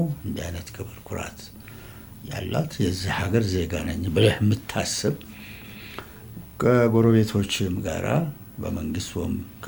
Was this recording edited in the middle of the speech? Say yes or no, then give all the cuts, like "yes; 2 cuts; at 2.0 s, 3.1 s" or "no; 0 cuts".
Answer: no; 0 cuts